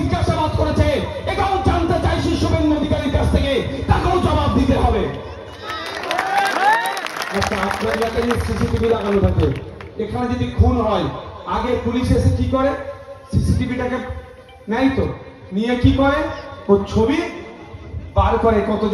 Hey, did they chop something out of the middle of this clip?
no; 0 cuts

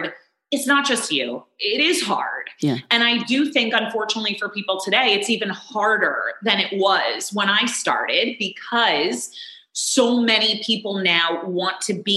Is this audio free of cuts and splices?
yes; 0 cuts

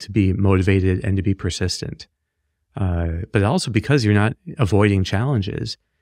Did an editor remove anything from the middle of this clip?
no; 0 cuts

